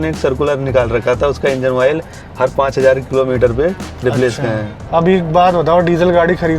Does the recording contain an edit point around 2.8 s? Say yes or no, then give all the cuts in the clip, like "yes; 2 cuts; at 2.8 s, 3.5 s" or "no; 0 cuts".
no; 1 cut; at 4.8 s